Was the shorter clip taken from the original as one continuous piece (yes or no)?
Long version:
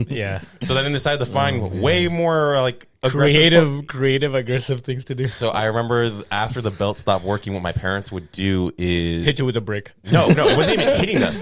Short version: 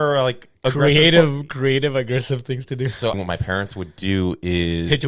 no